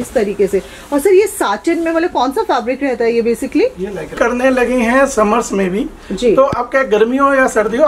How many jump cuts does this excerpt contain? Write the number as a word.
one